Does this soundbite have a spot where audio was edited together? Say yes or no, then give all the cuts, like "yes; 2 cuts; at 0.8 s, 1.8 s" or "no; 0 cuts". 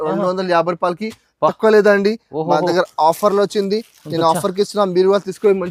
no; 0 cuts